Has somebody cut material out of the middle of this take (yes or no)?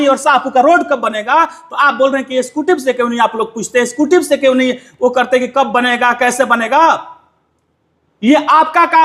no